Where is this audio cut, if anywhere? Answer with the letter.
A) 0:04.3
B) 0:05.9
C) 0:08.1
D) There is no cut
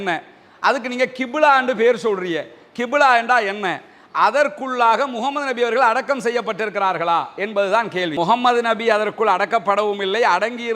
C